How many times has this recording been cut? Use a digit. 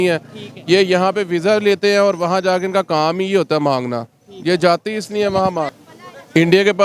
1